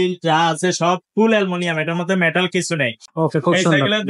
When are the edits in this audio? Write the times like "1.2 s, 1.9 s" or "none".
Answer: 3.0 s